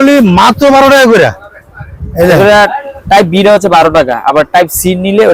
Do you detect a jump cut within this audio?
no; 0 cuts

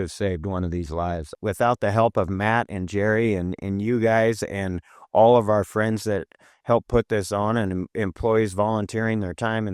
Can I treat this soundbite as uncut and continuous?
no; 1 cut; at 1.4 s

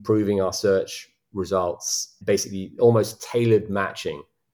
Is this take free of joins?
no; 1 cut; at 2.2 s

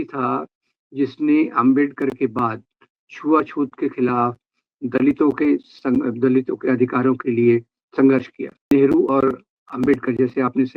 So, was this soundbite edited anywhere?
yes; 1 cut; at 8.7 s

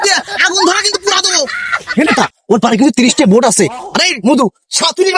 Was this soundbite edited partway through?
no; 0 cuts

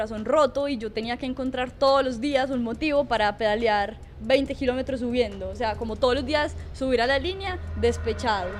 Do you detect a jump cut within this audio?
no; 0 cuts

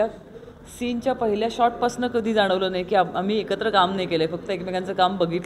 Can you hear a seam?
no; 0 cuts

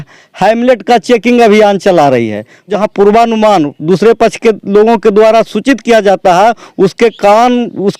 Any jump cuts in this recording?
yes; 1 cut; at 2.7 s

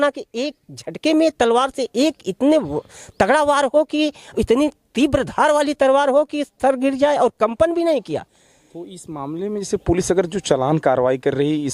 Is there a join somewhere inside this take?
no; 0 cuts

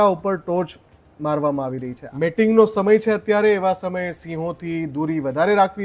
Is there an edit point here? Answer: yes; 1 cut; at 2.0 s

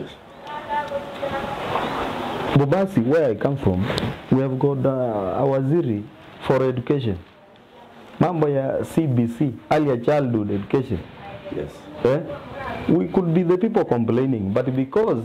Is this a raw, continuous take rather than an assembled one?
yes; 0 cuts

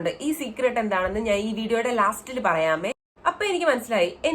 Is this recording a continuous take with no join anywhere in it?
no; 1 cut; at 3.1 s

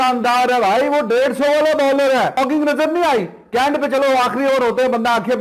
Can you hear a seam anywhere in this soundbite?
yes; 1 cut; at 2.4 s

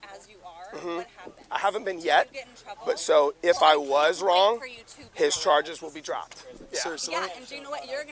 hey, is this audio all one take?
yes; 0 cuts

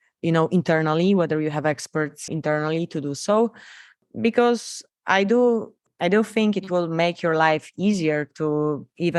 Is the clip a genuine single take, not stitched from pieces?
yes; 0 cuts

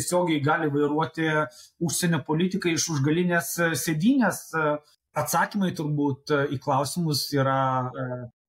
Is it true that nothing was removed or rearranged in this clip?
no; 1 cut; at 5.0 s

